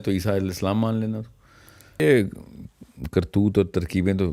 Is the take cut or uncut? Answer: cut